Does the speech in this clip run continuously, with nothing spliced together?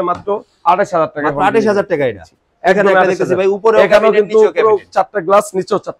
yes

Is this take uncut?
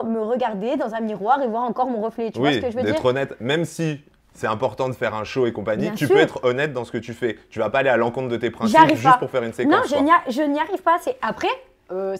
yes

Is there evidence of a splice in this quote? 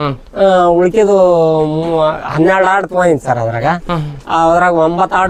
no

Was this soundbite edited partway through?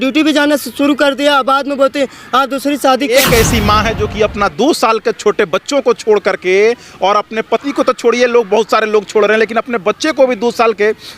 yes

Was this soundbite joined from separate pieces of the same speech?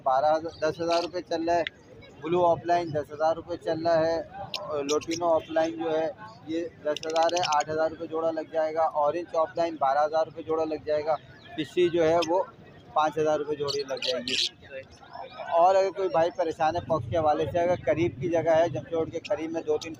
no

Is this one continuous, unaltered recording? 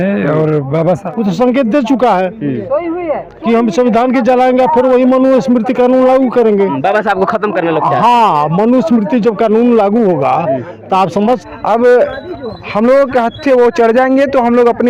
no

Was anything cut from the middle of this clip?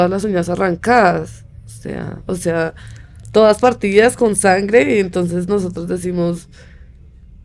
no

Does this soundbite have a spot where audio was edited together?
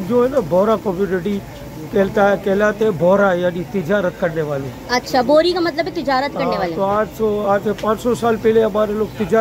no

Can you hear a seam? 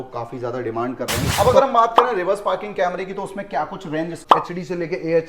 yes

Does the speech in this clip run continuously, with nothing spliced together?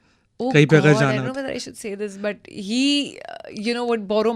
yes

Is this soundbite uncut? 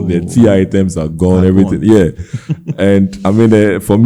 yes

